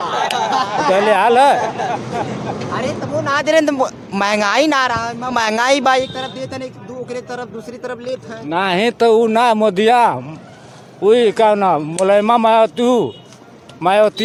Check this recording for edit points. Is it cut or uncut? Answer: uncut